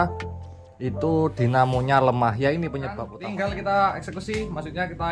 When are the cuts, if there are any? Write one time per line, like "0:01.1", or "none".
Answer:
0:03.1